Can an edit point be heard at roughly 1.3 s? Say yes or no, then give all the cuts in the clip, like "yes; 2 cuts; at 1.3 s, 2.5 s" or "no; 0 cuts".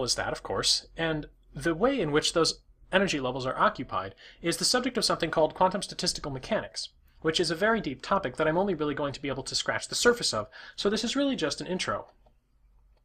yes; 1 cut; at 1.3 s